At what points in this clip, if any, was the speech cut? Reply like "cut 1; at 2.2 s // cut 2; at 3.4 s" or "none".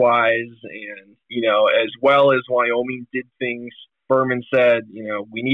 cut 1; at 4.0 s